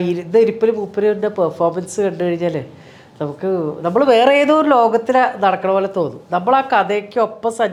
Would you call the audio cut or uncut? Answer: uncut